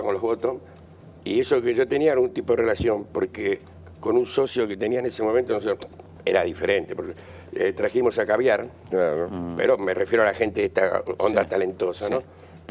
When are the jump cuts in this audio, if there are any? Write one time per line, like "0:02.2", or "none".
0:10.5